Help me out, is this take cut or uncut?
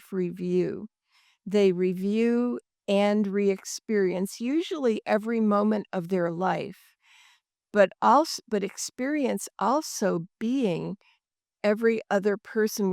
uncut